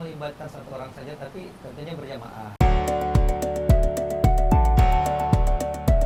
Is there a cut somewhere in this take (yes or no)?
no